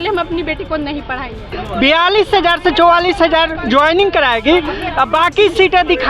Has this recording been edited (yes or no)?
yes